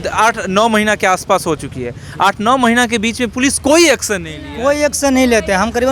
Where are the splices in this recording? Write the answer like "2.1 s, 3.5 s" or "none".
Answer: none